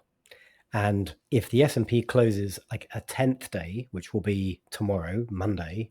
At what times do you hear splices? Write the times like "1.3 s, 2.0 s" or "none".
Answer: 1.2 s